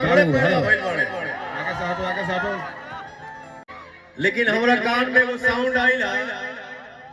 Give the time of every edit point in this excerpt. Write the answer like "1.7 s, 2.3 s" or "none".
3.7 s